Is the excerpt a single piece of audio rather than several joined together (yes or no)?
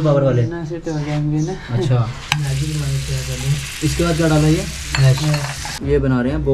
no